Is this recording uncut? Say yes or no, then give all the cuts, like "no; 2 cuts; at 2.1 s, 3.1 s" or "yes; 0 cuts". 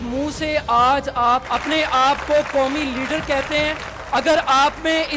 no; 2 cuts; at 1.4 s, 3.9 s